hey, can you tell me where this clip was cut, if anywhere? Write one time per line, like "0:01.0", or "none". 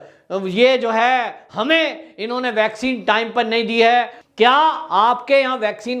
0:04.2